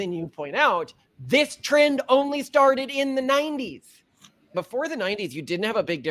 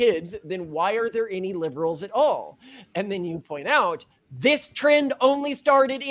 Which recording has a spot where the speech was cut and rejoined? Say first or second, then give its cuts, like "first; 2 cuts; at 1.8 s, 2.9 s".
first; 1 cut; at 4.5 s